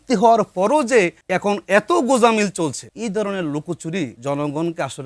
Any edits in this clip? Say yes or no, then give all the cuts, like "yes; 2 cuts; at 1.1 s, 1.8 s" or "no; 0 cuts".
yes; 3 cuts; at 1.2 s, 2.9 s, 4.2 s